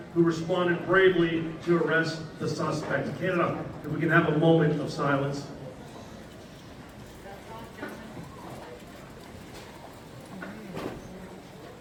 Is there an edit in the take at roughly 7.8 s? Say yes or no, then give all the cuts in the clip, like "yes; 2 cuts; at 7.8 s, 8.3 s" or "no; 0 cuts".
no; 0 cuts